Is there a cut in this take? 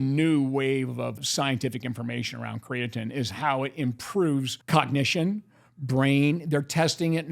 yes; 2 cuts; at 1.2 s, 4.6 s

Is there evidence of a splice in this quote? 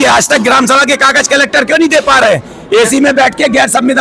no; 0 cuts

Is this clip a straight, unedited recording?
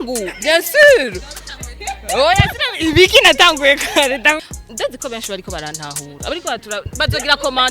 no; 1 cut; at 4.4 s

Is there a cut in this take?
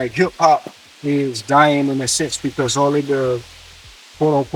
no; 0 cuts

